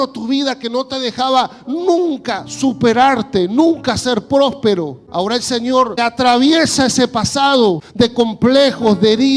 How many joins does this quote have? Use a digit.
3